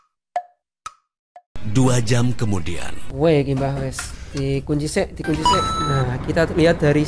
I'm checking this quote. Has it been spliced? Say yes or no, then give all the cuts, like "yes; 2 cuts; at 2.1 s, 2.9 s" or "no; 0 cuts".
no; 0 cuts